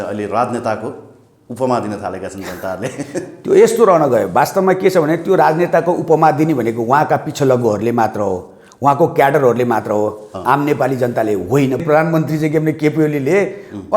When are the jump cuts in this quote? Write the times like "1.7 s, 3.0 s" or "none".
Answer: 11.8 s